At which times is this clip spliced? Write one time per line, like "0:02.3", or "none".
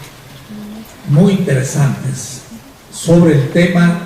0:01.6